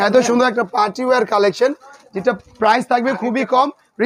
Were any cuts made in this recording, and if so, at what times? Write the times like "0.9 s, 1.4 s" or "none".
none

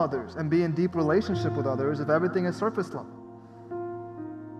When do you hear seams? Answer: none

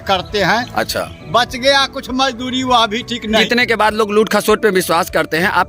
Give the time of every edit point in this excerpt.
3.4 s

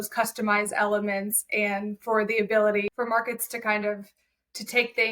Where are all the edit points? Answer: 2.9 s

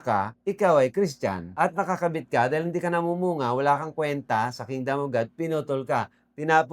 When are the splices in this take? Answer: 1.4 s

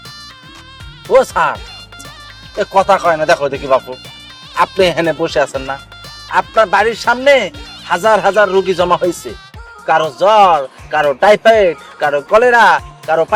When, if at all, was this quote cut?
none

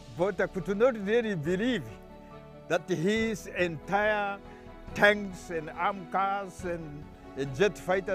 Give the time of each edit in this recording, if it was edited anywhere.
none

